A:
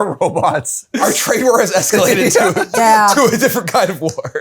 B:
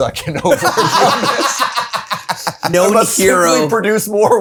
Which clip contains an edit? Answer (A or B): A